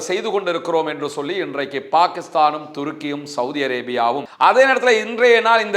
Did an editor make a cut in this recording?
yes; 1 cut; at 4.3 s

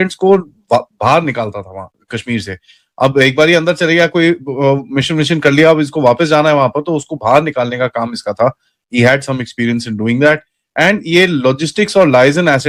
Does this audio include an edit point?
no; 0 cuts

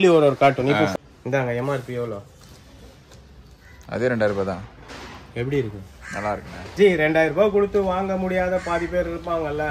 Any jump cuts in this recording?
yes; 1 cut; at 0.9 s

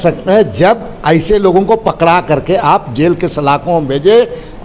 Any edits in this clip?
no; 0 cuts

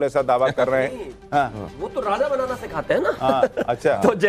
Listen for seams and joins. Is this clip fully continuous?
yes; 0 cuts

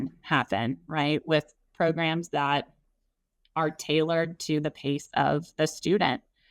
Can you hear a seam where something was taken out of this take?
no; 0 cuts

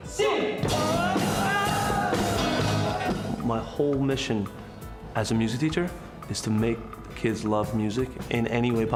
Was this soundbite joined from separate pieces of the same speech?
no; 0 cuts

